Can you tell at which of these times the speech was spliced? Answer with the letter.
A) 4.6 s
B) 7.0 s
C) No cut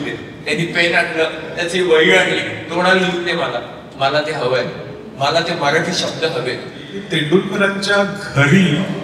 B